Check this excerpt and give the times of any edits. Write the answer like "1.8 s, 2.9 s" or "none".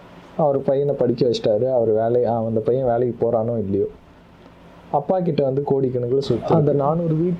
6.5 s